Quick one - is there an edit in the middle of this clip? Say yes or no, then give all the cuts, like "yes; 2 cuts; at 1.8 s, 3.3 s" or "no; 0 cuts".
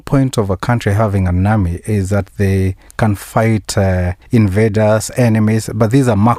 yes; 1 cut; at 4.1 s